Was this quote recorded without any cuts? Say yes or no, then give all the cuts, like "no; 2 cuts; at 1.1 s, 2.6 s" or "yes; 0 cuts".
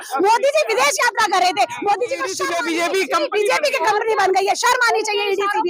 no; 1 cut; at 2.4 s